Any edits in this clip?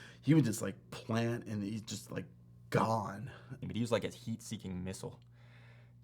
yes; 1 cut; at 3.6 s

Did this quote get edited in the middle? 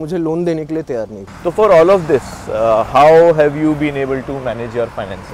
yes; 1 cut; at 1.2 s

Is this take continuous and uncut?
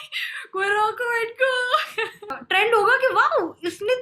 no; 1 cut; at 2.4 s

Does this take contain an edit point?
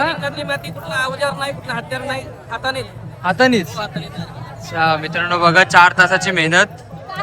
no; 0 cuts

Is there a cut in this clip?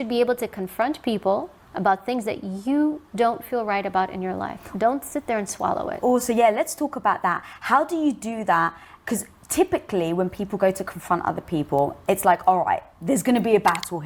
no; 0 cuts

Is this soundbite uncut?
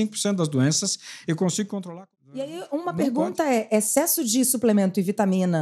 no; 1 cut; at 1.9 s

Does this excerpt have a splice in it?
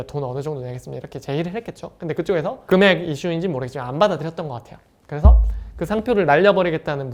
no; 0 cuts

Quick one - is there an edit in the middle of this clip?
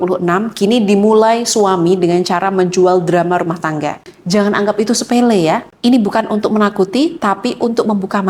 yes; 1 cut; at 4.1 s

